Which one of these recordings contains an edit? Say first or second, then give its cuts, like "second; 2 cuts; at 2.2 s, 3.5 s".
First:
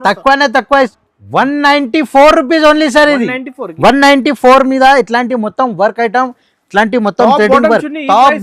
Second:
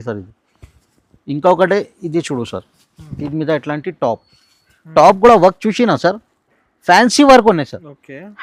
first; 1 cut; at 0.9 s